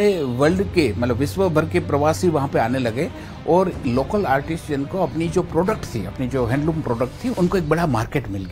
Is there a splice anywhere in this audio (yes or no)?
yes